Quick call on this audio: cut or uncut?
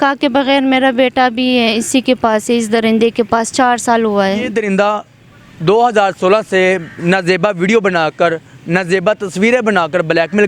cut